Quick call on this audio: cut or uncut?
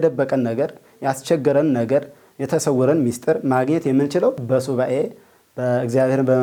uncut